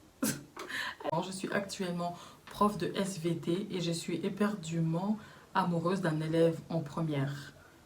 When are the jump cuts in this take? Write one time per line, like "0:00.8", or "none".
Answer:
0:01.1